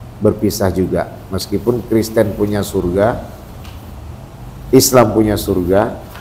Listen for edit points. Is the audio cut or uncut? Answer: uncut